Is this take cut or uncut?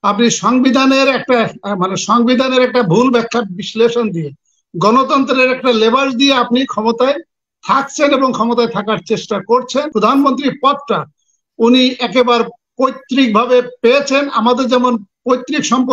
cut